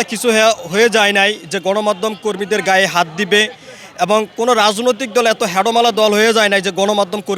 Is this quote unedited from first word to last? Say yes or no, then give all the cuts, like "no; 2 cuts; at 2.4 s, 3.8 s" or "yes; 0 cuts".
yes; 0 cuts